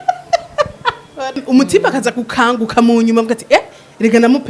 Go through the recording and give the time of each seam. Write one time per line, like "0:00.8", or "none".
0:01.4